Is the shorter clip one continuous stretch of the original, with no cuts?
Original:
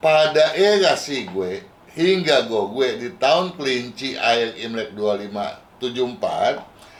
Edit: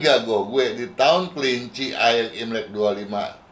yes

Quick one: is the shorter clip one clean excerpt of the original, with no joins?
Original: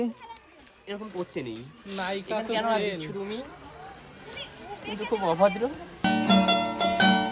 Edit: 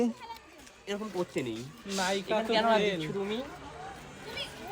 yes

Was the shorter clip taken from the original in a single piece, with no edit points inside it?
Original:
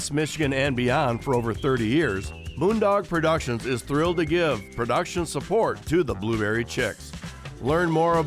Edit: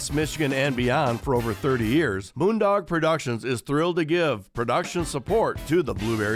no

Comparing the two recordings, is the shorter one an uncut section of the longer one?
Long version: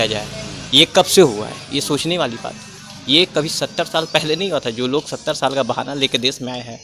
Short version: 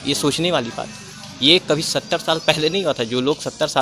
yes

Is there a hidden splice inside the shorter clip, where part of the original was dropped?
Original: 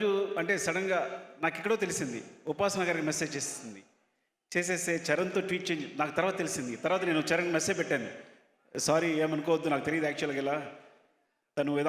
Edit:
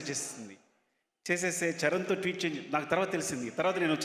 no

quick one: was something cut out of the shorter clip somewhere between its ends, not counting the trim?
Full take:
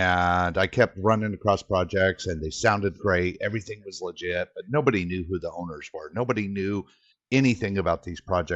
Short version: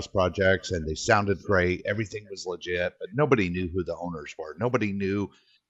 no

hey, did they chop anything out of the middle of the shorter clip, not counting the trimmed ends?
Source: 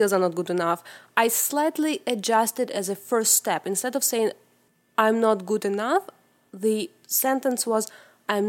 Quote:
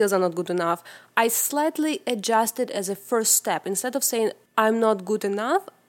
yes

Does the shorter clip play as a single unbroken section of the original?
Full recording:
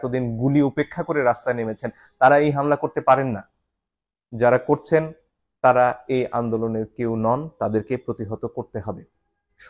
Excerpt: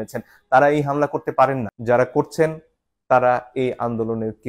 no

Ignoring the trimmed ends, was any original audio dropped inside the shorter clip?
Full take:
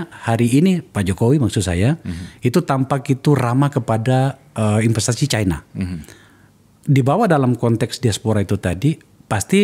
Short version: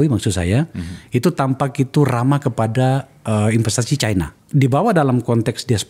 yes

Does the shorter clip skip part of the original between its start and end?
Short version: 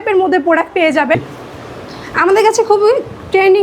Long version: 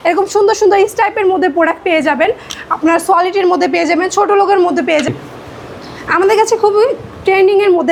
yes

